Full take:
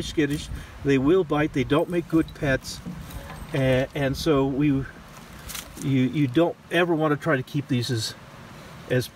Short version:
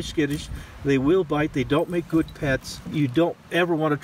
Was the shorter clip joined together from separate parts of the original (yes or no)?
yes